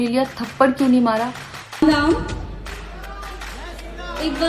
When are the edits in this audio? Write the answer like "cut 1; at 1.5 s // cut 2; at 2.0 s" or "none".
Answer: cut 1; at 1.6 s